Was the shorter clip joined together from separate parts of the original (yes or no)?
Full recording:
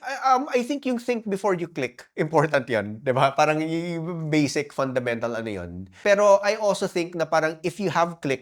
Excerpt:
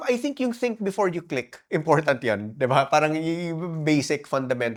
no